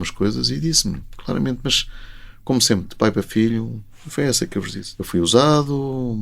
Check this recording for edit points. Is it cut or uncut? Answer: cut